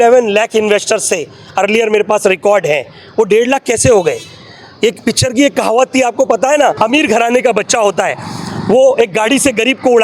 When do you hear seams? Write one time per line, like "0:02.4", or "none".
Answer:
0:06.8